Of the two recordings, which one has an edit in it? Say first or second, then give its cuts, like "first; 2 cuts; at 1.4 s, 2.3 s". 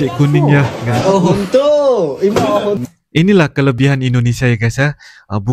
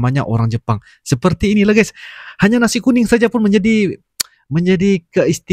first; 1 cut; at 2.8 s